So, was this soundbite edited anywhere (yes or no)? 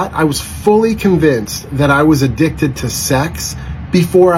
no